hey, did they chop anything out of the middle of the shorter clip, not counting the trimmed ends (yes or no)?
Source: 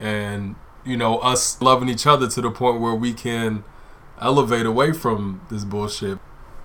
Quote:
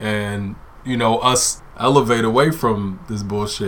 yes